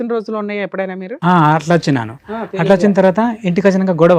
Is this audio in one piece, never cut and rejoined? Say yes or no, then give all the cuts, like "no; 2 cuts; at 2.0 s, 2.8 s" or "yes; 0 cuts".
yes; 0 cuts